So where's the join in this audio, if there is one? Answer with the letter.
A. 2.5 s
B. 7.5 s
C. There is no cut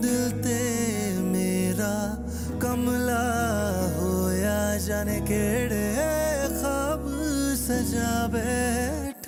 C